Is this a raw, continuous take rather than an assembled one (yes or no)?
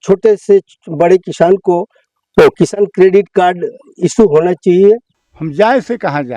no